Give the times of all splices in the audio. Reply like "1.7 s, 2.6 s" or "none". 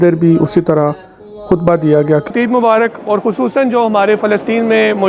2.3 s

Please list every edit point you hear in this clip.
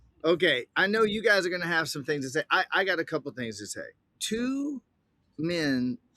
4.1 s

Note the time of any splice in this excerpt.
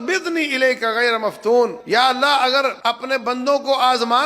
1.8 s, 2.8 s

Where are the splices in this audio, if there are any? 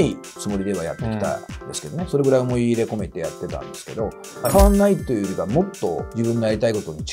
4.5 s, 6.1 s

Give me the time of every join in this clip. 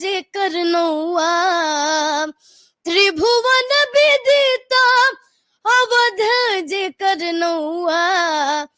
none

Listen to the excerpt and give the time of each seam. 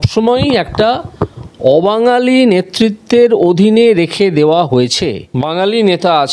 5.2 s

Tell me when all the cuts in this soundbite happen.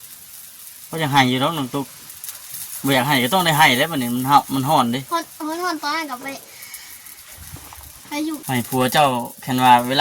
8.4 s

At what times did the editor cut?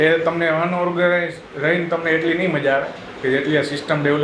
none

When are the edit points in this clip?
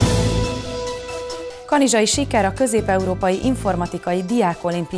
1.2 s

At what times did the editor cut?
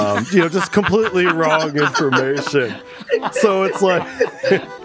none

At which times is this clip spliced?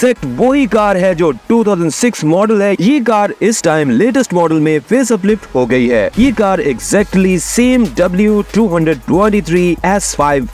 none

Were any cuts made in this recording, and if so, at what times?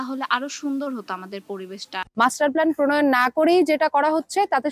2.0 s

